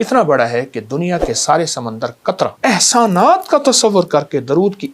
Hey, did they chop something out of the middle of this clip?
yes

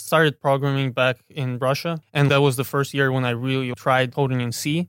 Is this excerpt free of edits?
no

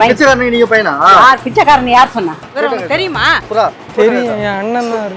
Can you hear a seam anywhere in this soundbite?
yes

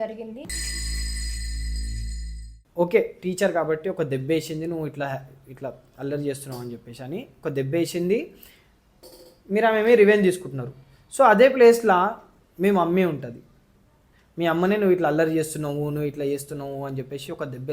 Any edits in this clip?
yes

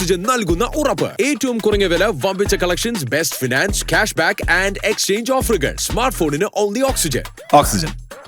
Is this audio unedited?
yes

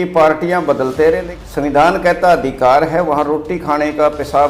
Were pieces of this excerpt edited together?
yes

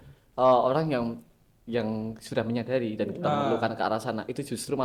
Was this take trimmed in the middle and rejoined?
no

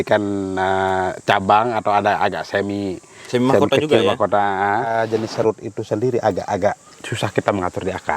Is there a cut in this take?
yes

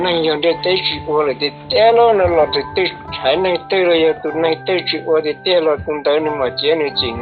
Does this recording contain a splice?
no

